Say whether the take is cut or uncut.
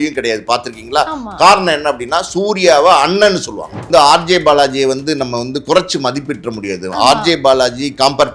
cut